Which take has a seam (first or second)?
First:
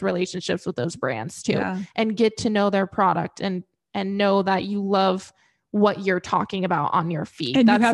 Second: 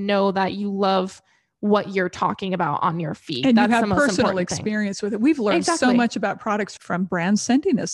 second